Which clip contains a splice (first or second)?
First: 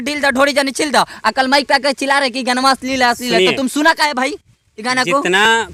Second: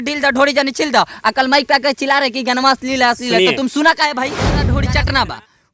second